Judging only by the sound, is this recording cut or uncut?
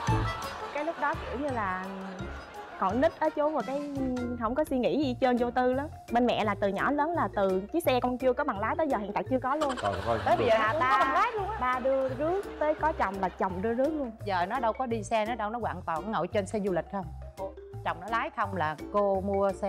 uncut